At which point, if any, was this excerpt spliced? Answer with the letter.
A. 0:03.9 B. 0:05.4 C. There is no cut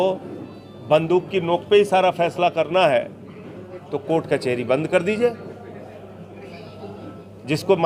C